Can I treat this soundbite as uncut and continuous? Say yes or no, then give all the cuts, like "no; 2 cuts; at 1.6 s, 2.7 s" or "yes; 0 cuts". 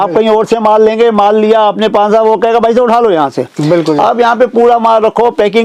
yes; 0 cuts